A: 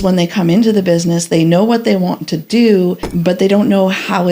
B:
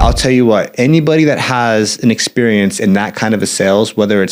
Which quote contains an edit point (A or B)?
A